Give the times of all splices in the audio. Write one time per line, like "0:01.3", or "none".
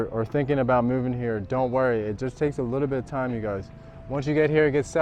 none